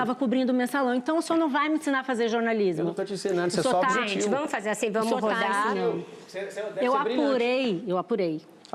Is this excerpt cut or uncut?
uncut